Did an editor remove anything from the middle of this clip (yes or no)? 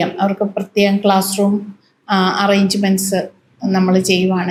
no